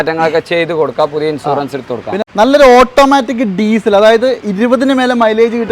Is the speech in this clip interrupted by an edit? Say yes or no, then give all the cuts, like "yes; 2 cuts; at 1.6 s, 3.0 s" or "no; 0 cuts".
yes; 1 cut; at 2.2 s